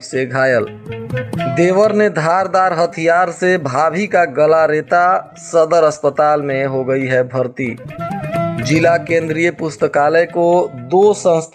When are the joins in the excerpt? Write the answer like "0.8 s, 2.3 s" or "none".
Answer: none